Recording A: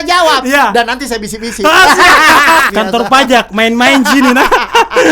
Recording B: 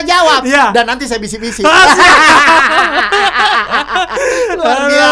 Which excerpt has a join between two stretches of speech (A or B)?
A